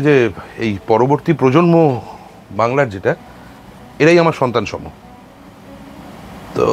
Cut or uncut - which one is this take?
uncut